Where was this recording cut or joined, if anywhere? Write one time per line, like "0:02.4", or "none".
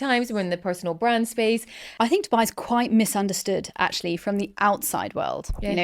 0:01.8